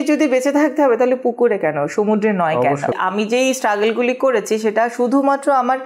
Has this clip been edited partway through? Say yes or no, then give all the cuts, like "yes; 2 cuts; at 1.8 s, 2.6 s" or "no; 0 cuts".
yes; 1 cut; at 2.9 s